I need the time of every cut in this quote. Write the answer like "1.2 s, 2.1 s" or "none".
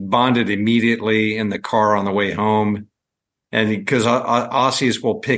none